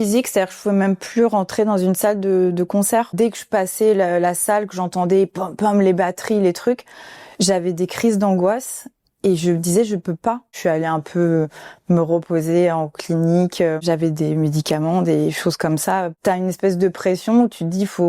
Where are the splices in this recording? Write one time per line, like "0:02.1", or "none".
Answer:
0:03.1
0:10.5
0:13.8
0:16.1